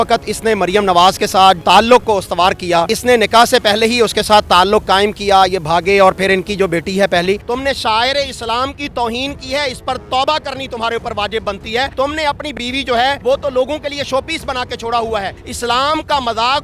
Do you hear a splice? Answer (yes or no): yes